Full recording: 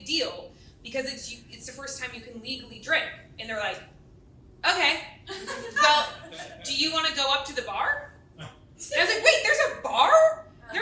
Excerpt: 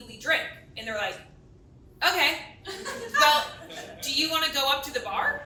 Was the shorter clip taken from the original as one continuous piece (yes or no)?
yes